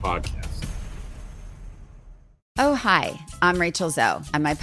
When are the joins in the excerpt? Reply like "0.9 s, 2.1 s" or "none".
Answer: 2.5 s